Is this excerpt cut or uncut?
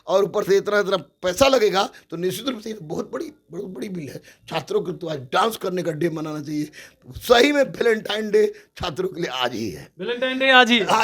uncut